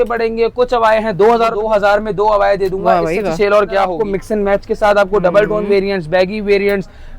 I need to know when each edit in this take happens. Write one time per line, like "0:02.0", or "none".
0:01.6
0:04.0